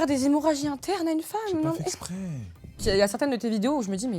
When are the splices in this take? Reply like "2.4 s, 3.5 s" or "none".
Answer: 2.8 s